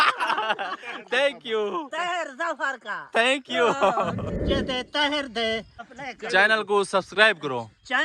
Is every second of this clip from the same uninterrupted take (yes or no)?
no